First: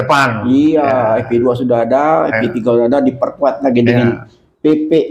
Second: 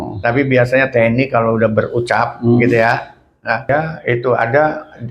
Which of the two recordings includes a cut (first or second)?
second